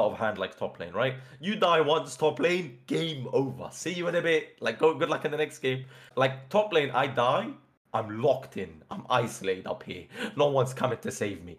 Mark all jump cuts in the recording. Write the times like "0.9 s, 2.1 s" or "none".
6.1 s